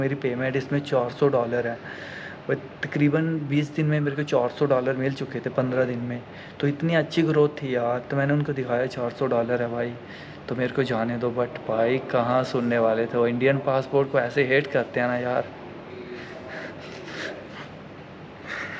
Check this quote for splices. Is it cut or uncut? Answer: uncut